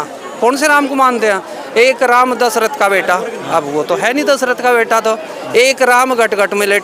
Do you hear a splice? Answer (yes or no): no